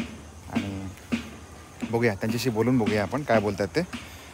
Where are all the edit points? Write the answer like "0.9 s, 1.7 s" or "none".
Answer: none